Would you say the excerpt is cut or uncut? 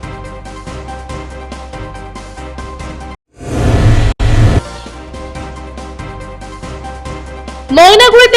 cut